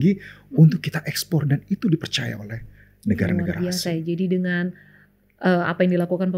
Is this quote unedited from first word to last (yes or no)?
yes